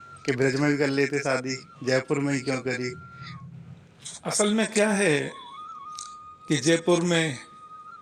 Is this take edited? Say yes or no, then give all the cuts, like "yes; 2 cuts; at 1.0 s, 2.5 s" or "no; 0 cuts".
no; 0 cuts